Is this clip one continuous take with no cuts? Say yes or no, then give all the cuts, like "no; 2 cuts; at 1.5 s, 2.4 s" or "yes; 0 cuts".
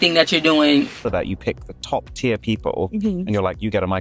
no; 1 cut; at 1.1 s